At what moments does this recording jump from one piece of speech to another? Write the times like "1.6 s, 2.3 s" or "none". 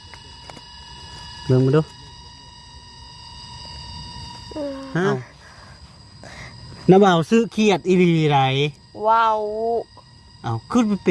5.2 s